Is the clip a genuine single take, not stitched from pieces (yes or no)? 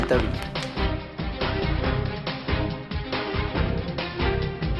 yes